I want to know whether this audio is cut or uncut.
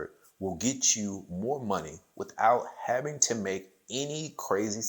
uncut